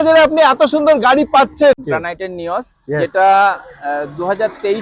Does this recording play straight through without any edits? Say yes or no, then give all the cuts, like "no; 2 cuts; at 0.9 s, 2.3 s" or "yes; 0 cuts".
no; 1 cut; at 1.8 s